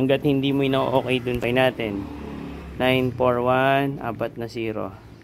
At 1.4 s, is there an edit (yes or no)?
yes